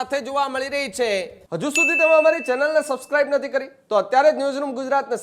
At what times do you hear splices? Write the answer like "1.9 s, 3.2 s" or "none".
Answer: 1.4 s

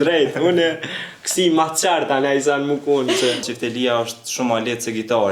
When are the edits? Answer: 3.5 s

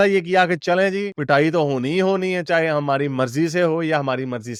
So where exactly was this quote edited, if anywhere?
none

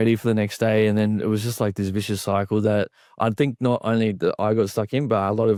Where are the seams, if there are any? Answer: none

